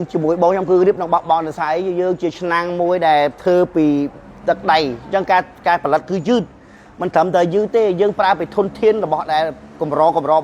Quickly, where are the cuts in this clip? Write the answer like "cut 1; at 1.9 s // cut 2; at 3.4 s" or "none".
none